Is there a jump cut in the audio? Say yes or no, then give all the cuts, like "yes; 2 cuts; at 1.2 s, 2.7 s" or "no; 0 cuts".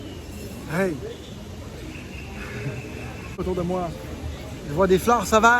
yes; 1 cut; at 3.4 s